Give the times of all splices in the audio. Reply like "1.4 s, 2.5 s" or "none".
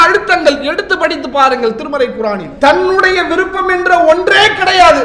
2.5 s